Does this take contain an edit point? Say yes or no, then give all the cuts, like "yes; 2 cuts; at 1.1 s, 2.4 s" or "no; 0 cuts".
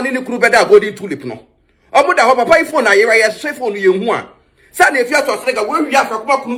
no; 0 cuts